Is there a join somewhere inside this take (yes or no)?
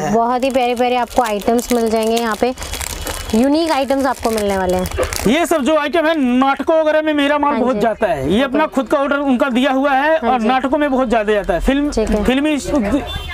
no